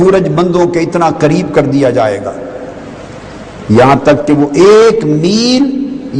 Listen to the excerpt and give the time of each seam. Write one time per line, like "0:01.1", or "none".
none